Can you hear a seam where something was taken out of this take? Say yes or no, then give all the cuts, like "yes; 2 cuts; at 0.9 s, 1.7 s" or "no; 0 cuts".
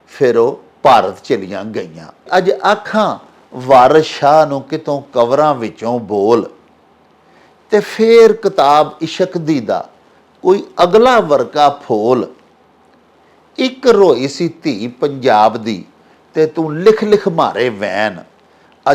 yes; 1 cut; at 2.2 s